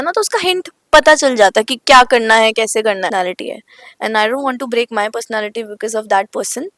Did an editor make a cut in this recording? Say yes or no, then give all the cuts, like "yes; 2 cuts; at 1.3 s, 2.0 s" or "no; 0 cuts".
yes; 1 cut; at 3.1 s